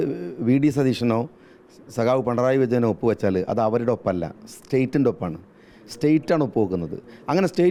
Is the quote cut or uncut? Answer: uncut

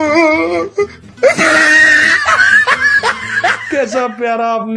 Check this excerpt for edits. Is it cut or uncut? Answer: cut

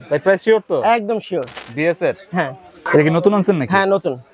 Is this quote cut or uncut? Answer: cut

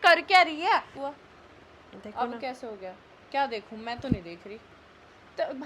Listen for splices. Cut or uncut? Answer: cut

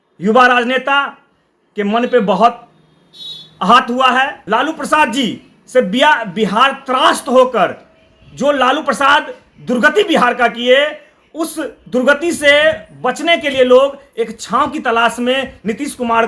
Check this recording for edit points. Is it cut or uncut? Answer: cut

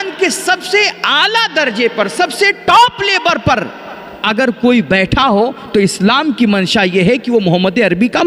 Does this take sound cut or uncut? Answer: uncut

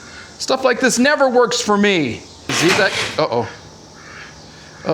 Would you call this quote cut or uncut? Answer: cut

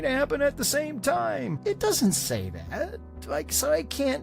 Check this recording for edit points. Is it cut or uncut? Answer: cut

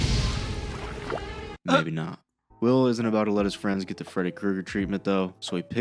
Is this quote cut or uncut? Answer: uncut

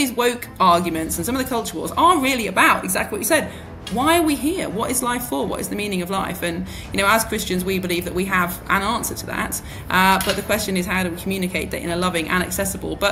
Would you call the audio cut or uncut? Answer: uncut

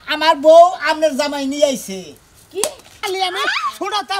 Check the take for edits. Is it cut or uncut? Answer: cut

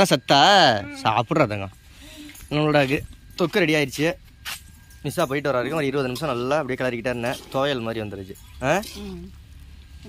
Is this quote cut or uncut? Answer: uncut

